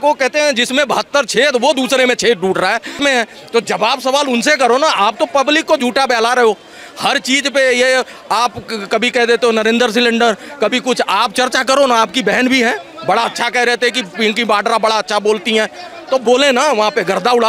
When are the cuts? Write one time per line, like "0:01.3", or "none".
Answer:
0:03.0